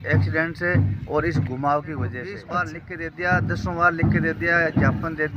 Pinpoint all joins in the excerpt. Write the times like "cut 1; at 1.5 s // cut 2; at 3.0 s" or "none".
cut 1; at 2.4 s